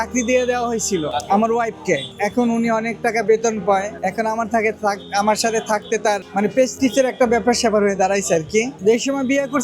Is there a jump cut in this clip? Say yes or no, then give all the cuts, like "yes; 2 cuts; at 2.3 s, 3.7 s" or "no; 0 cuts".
no; 0 cuts